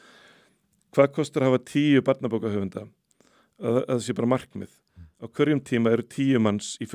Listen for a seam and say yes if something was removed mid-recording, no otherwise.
no